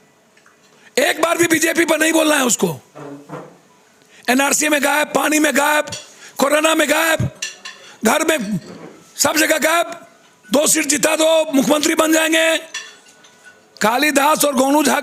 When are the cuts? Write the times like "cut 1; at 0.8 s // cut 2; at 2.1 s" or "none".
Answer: none